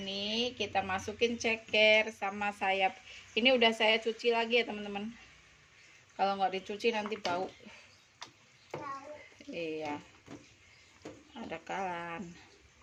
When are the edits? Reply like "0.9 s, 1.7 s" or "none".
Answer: none

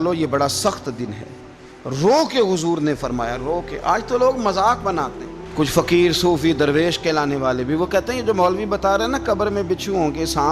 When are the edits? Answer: none

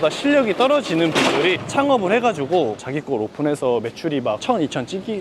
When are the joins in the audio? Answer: 2.8 s

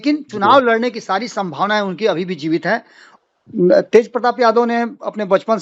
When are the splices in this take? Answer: 3.0 s

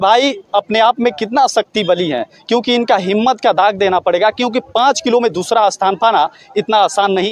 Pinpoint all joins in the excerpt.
none

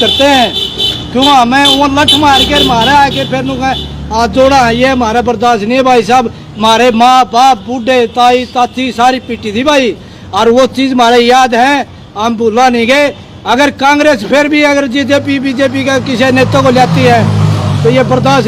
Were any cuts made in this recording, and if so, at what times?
none

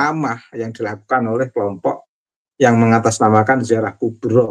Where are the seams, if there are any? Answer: none

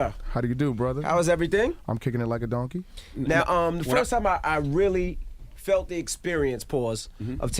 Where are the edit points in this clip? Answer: 3.9 s

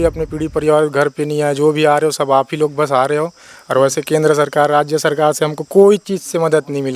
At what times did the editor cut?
none

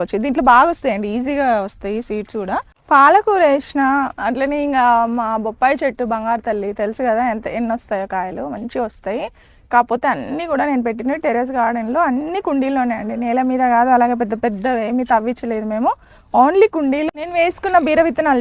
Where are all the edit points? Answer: 2.7 s, 17.1 s

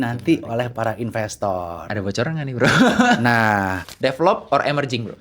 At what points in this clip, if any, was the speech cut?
3.8 s

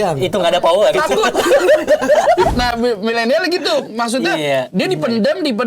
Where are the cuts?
2.5 s

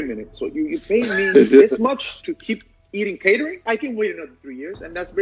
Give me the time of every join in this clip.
2.2 s, 3.6 s

